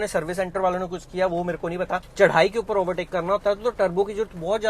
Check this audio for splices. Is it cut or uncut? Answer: cut